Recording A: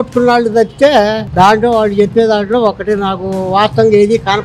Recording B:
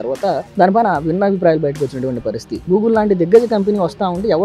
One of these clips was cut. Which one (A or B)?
B